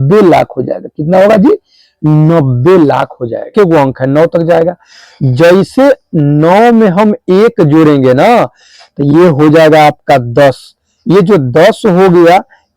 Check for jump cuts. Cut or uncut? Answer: cut